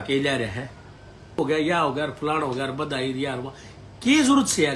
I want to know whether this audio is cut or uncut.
cut